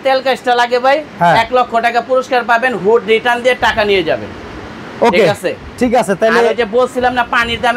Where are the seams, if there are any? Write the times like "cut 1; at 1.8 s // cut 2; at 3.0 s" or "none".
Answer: none